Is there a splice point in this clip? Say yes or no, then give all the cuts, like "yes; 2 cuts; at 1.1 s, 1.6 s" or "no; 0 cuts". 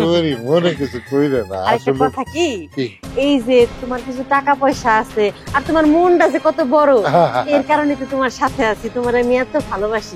no; 0 cuts